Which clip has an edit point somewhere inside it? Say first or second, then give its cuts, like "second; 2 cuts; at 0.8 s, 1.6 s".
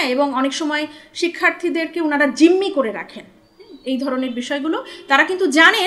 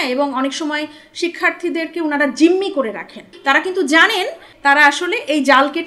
second; 2 cuts; at 3.3 s, 4.5 s